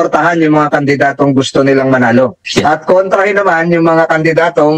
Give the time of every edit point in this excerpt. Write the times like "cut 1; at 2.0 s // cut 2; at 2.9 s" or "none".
cut 1; at 2.4 s